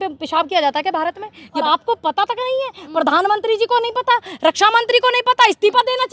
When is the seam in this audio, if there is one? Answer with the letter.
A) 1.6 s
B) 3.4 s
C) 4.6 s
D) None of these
A